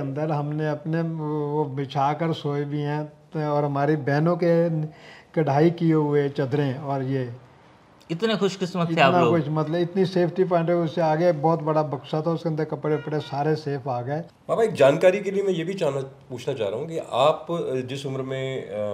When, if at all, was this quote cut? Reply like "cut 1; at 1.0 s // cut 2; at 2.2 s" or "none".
cut 1; at 14.3 s